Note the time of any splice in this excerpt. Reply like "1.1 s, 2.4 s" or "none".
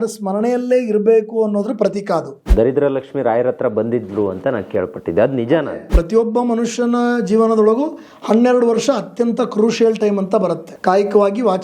2.5 s, 5.9 s, 10.7 s